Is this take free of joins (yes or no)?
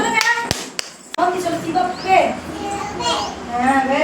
no